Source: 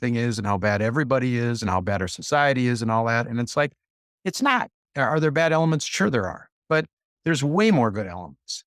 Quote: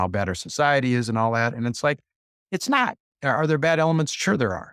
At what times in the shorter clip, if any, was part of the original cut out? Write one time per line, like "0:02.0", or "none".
none